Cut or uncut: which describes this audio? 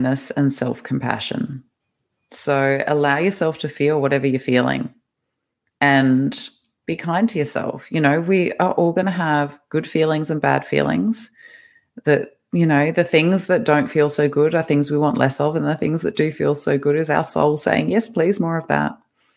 uncut